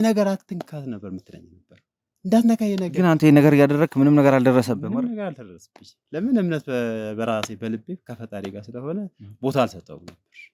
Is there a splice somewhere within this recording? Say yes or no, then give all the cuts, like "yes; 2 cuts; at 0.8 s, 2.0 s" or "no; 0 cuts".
no; 0 cuts